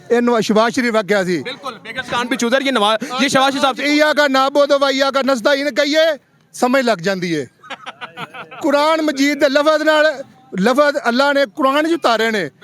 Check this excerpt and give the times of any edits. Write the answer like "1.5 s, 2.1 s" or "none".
none